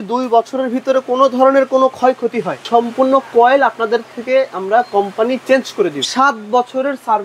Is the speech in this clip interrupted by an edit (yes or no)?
yes